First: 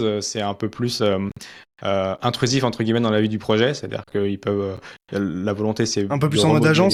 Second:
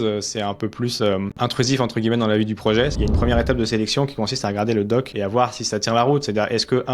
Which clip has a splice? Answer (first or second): second